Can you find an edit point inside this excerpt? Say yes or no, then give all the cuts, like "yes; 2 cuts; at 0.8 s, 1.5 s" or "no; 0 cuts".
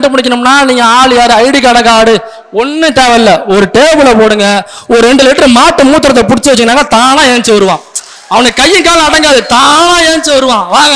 no; 0 cuts